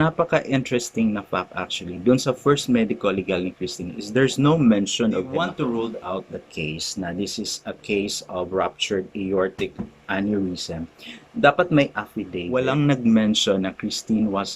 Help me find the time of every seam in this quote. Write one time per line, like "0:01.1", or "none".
0:05.3
0:12.4